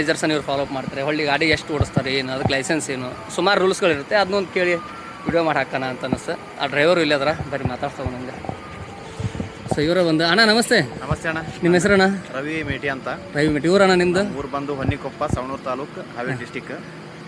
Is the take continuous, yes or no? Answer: yes